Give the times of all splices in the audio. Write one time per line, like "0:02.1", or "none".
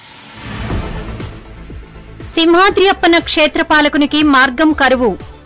0:01.2